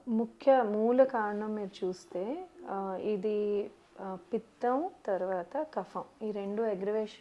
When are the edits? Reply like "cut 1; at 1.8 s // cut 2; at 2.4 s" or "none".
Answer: none

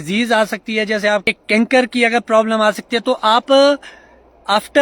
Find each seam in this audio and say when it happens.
cut 1; at 1.3 s

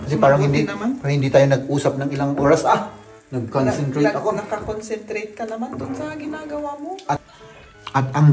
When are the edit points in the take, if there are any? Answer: cut 1; at 7.2 s

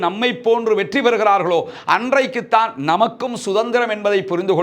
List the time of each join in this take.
none

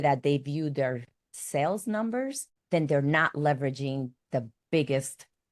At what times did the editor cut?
cut 1; at 2.5 s

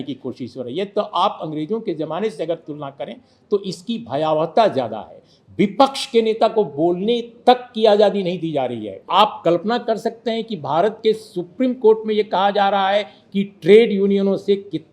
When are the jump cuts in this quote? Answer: cut 1; at 9.1 s

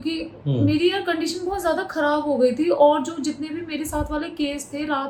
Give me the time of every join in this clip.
none

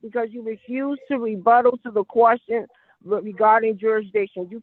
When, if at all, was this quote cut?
none

